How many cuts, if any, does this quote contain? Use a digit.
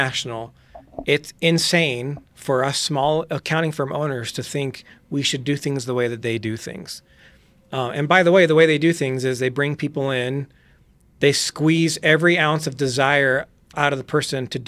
1